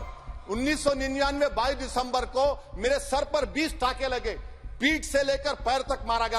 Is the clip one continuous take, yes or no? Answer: yes